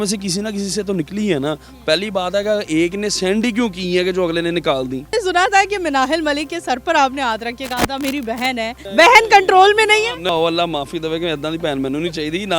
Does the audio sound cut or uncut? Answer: cut